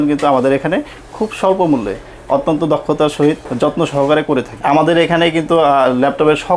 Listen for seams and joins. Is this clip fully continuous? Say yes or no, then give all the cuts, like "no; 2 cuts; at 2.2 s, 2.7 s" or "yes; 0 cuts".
no; 2 cuts; at 3.5 s, 4.6 s